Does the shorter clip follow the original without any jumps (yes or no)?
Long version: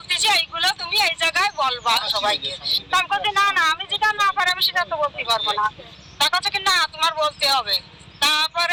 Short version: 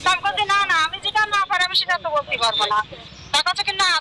yes